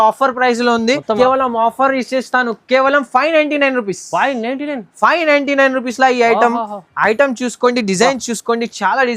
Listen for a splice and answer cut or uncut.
cut